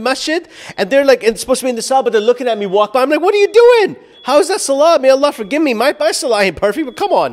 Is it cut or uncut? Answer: uncut